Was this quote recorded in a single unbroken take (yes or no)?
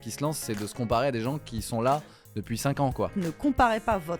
no